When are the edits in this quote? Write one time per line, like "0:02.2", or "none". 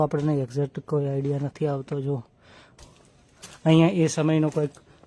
0:02.8